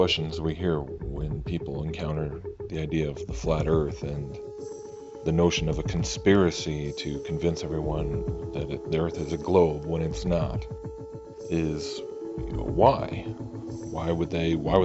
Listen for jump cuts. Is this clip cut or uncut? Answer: cut